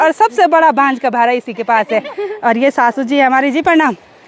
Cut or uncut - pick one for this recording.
uncut